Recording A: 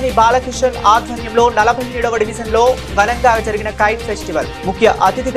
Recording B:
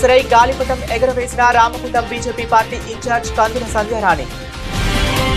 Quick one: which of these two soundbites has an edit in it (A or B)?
B